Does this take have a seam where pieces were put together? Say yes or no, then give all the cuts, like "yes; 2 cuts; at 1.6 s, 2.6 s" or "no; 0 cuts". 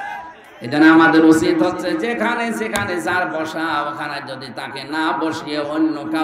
no; 0 cuts